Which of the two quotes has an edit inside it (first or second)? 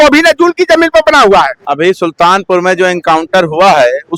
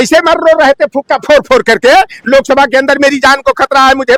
first